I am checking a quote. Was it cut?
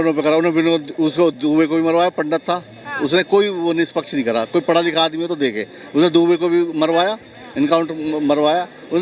no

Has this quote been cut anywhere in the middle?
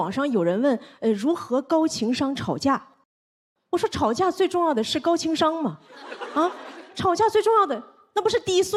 no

